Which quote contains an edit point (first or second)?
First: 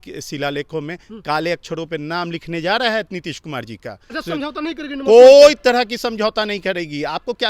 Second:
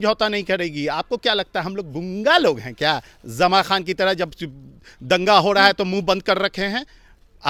first